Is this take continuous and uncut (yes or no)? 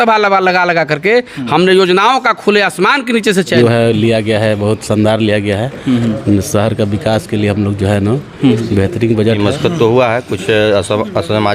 no